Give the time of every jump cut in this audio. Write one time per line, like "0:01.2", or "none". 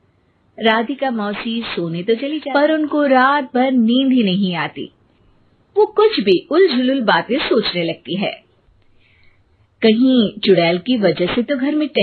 0:02.3